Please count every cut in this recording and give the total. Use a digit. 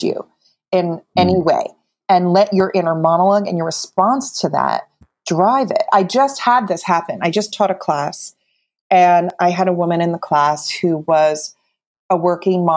2